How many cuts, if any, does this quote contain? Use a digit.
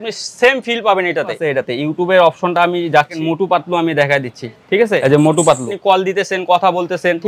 4